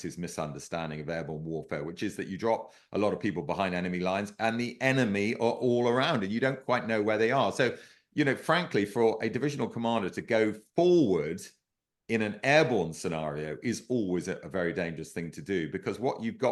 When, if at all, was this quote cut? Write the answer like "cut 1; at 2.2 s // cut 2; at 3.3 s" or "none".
none